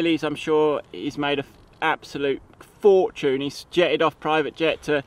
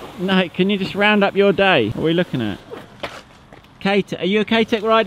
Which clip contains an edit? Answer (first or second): second